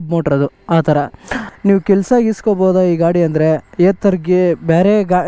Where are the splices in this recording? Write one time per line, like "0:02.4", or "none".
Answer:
0:01.4